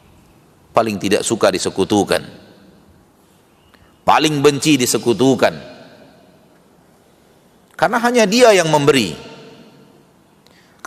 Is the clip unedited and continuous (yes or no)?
yes